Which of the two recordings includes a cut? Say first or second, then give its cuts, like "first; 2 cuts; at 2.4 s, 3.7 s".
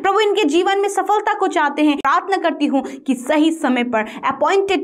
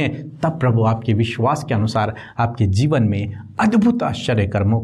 first; 1 cut; at 2.0 s